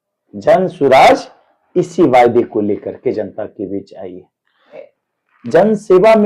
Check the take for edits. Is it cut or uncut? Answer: cut